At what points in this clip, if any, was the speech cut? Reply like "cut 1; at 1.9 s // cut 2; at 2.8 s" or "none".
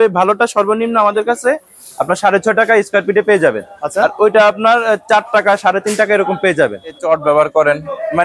cut 1; at 7.0 s